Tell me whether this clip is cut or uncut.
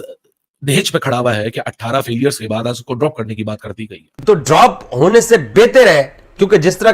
cut